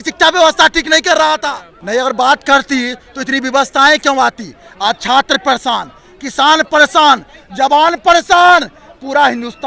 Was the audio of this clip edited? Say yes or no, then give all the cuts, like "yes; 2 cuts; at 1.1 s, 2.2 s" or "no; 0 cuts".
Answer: yes; 1 cut; at 1.4 s